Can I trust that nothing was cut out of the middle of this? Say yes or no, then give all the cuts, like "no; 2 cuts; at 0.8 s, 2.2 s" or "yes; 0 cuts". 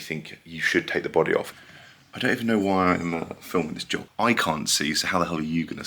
no; 2 cuts; at 1.6 s, 4.0 s